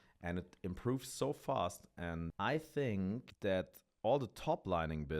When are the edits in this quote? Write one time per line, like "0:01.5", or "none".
0:02.3
0:03.3